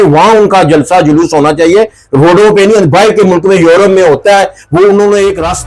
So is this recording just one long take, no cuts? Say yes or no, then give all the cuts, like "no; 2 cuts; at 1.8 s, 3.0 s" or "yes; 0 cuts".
yes; 0 cuts